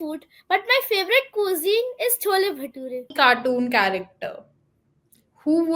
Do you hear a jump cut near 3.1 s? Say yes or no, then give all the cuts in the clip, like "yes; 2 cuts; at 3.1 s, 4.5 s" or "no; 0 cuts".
yes; 1 cut; at 3.1 s